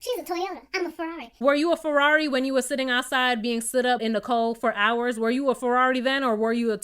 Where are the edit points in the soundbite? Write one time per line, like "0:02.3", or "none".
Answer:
0:01.4
0:04.0